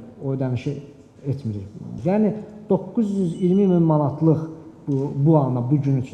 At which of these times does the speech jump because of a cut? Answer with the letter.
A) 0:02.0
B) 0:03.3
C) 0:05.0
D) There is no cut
A